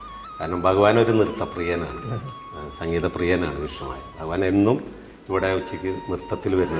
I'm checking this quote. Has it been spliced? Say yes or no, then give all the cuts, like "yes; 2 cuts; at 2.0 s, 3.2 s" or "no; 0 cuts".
no; 0 cuts